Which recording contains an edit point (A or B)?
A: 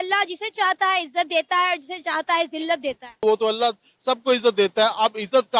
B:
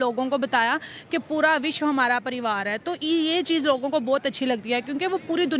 A